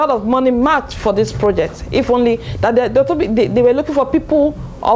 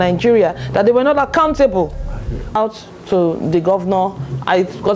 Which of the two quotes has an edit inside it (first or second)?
second